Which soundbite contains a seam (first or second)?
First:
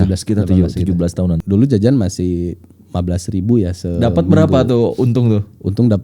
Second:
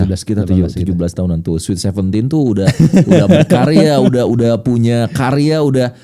first